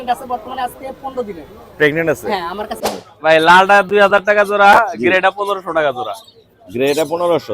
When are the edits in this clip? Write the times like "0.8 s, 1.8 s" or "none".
3.0 s